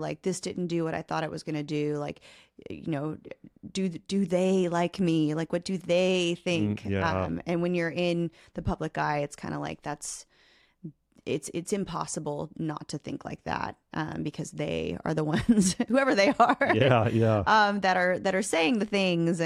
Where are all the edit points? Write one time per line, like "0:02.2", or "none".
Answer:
none